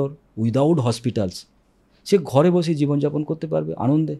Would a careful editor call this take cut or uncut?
uncut